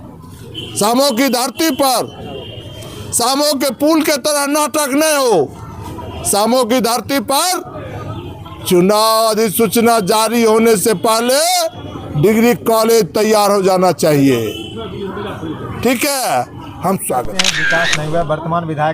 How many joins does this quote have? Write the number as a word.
one